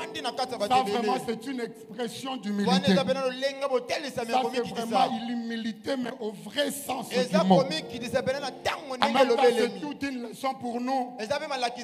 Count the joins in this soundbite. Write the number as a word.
zero